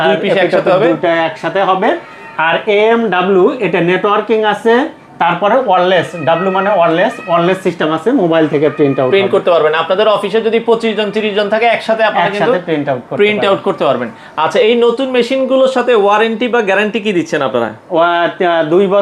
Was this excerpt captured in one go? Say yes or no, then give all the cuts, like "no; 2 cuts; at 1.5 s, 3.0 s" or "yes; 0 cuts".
yes; 0 cuts